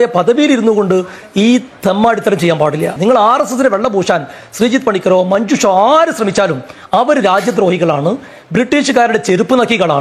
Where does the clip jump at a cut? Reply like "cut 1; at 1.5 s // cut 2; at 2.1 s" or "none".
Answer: none